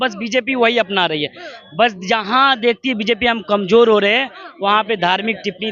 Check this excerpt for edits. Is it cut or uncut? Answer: uncut